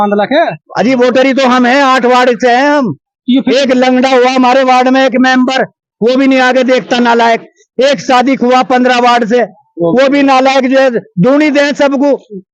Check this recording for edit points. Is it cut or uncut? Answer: uncut